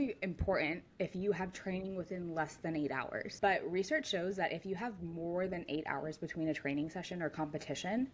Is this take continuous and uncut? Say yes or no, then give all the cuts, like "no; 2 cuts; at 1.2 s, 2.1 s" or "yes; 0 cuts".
no; 1 cut; at 3.4 s